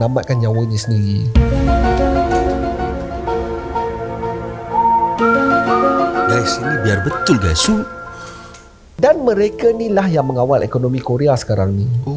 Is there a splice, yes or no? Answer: yes